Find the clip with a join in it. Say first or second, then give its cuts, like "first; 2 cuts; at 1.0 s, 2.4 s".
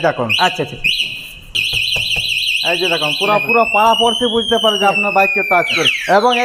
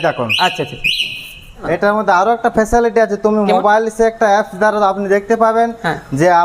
second; 1 cut; at 1.7 s